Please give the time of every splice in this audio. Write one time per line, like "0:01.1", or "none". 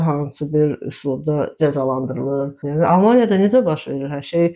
0:02.6